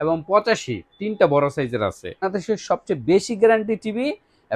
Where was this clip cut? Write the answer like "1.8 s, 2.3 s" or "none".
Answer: 2.3 s